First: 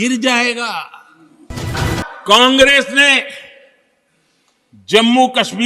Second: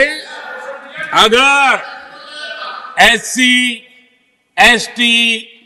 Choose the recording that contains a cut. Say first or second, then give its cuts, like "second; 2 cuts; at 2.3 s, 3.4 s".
first; 1 cut; at 1.6 s